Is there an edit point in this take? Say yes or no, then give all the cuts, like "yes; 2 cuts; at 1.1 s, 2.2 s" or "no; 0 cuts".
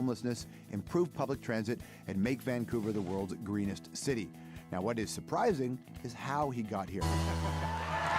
no; 0 cuts